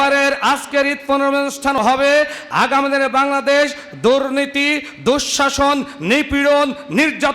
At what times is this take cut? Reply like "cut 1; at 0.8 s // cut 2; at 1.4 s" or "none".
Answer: cut 1; at 1.8 s